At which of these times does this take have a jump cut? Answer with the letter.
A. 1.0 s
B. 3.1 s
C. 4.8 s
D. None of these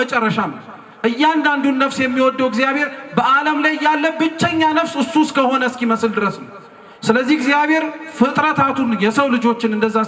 D